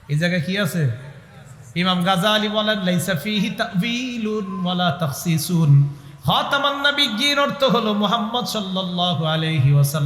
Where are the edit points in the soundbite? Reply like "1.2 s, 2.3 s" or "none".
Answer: none